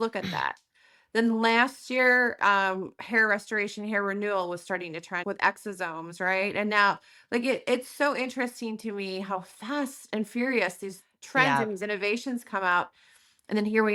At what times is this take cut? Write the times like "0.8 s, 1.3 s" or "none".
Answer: none